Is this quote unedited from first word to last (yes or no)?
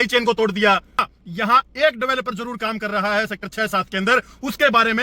no